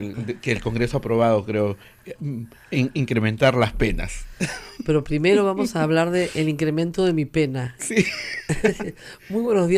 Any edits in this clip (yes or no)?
no